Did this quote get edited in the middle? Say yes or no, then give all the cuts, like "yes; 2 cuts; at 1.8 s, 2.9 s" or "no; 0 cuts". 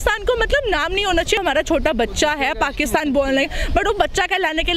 yes; 1 cut; at 1.4 s